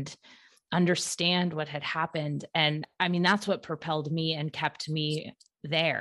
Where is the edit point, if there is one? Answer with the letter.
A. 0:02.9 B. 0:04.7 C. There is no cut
A